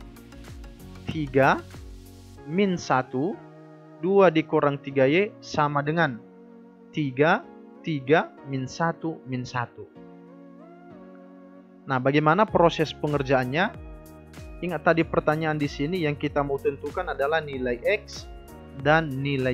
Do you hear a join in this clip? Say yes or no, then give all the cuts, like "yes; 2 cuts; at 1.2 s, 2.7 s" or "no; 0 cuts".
no; 0 cuts